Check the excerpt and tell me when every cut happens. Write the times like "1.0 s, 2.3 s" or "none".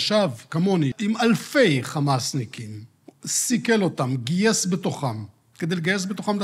1.0 s